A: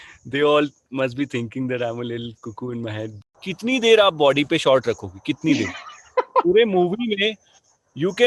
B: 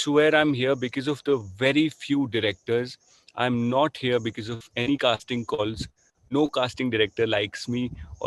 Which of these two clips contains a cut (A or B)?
A